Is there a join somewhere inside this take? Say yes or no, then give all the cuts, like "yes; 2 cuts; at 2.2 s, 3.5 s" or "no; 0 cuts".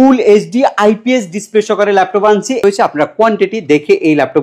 yes; 1 cut; at 2.6 s